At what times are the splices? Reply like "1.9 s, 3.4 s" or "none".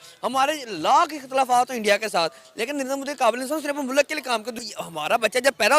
4.6 s

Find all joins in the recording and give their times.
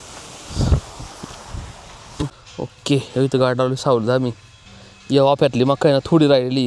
2.4 s

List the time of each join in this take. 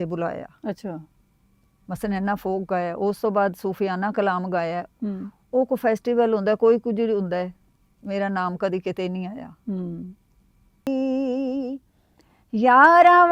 10.9 s

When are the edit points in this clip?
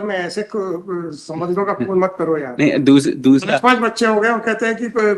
none

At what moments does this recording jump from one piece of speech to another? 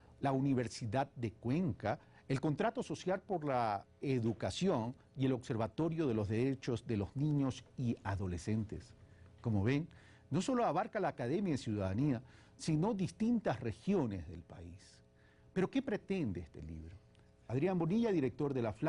11.7 s

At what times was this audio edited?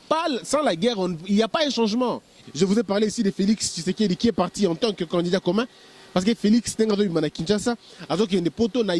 2.3 s

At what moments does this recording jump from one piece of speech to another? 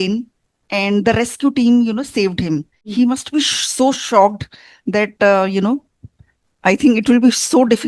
2.8 s

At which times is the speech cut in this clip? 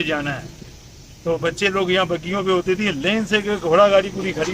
none

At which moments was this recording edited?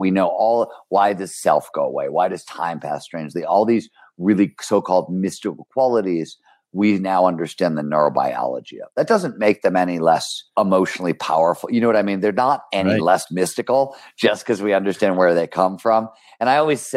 10.4 s

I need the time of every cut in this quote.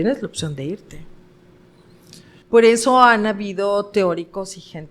2.3 s

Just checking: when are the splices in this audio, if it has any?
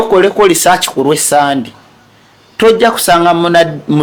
none

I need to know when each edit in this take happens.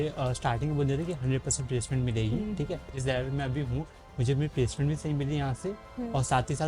3.0 s

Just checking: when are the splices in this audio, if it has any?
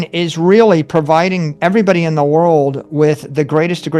1.5 s

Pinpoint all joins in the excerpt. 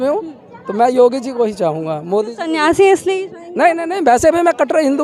none

